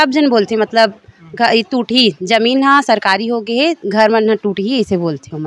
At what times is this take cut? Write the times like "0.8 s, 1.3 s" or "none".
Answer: none